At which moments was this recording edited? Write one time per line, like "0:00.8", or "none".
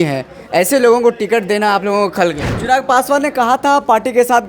0:02.5